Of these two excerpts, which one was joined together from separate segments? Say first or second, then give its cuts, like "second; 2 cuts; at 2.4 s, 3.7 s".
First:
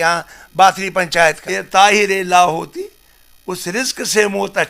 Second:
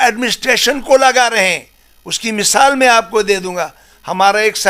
first; 1 cut; at 1.5 s